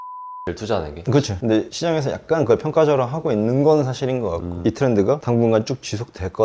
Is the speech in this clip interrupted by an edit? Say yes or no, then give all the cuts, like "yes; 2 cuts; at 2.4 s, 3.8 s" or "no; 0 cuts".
yes; 2 cuts; at 1.4 s, 4.5 s